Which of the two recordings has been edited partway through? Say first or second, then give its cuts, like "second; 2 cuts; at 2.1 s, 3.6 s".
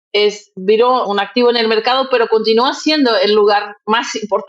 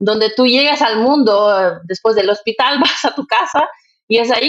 first; 1 cut; at 1.0 s